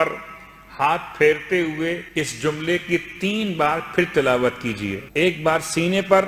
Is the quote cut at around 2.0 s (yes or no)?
yes